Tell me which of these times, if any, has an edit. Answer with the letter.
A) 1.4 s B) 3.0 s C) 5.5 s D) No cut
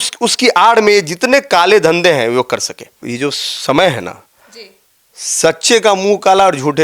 B